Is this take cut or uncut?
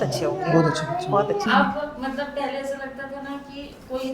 cut